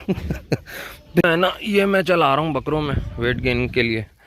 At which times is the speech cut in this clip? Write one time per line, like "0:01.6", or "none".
0:01.2